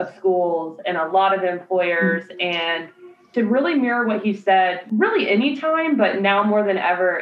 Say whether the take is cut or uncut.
cut